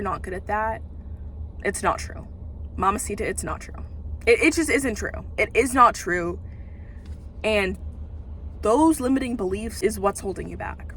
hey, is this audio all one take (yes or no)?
no